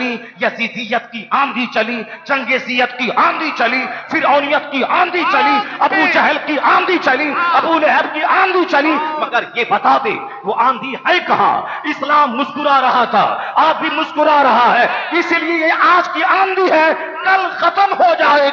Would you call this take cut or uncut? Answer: uncut